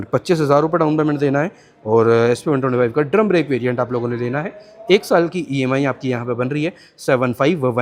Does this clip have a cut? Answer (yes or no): no